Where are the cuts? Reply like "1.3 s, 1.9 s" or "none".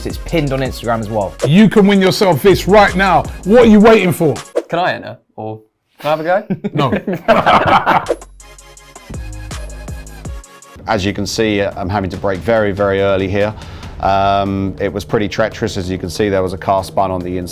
10.8 s

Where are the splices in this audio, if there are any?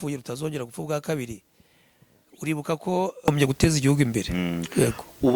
3.3 s

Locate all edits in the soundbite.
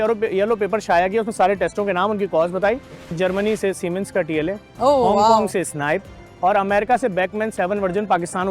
3.1 s

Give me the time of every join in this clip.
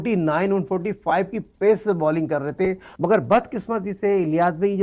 2.9 s

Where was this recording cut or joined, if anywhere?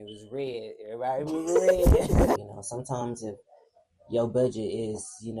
2.4 s

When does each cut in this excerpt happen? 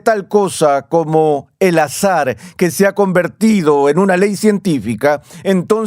none

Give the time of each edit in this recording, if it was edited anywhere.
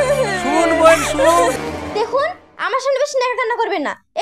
1.5 s

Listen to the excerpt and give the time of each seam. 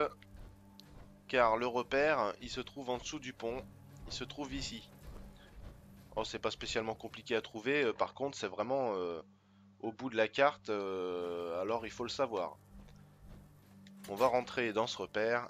none

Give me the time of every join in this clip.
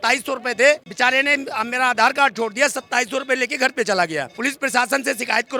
none

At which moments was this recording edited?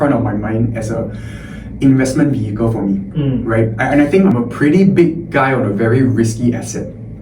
4.3 s

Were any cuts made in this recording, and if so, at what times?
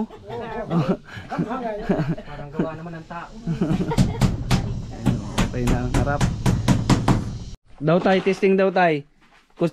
7.4 s

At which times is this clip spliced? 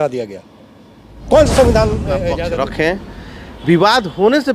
2.3 s

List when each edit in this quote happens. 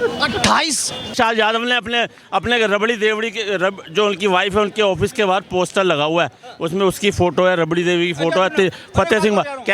1.1 s

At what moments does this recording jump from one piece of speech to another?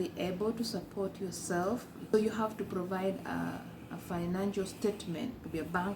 2.1 s

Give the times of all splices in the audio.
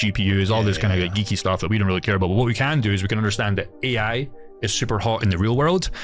none

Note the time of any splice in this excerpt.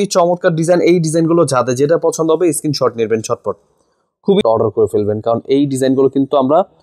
4.4 s

